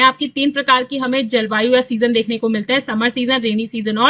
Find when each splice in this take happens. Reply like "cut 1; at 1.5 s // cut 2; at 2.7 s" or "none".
none